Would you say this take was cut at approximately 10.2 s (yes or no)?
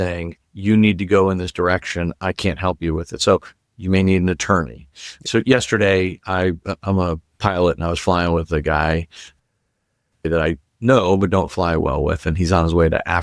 yes